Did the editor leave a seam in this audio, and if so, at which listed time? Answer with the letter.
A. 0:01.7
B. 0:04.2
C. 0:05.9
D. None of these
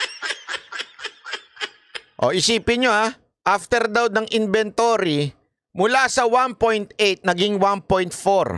A